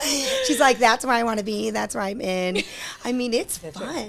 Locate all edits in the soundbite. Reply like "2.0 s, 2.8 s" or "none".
none